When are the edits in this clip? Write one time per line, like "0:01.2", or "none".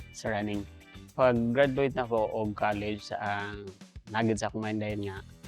0:01.1